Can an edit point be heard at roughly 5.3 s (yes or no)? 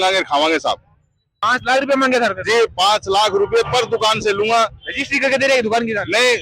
no